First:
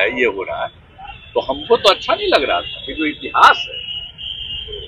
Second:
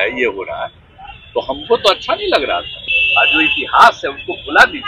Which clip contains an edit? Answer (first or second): second